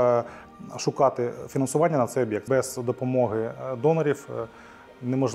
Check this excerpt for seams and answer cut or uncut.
cut